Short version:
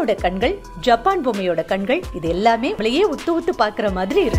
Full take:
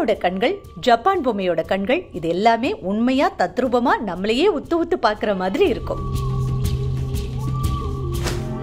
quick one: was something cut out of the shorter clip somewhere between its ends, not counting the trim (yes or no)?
yes